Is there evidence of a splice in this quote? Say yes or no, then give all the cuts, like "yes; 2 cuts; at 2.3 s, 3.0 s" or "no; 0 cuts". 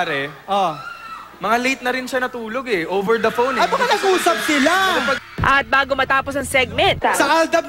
yes; 1 cut; at 5.3 s